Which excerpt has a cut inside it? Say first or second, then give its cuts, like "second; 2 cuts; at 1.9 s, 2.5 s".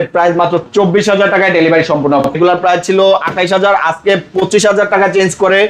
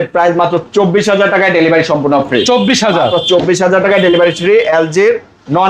first; 1 cut; at 2.3 s